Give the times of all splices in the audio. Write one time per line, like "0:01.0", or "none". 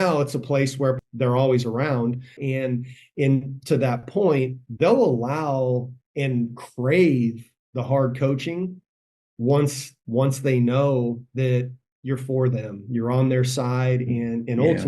0:01.0
0:02.4